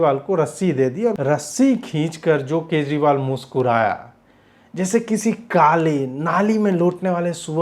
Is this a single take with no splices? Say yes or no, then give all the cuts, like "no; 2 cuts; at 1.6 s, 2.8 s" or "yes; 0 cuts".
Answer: no; 1 cut; at 1.2 s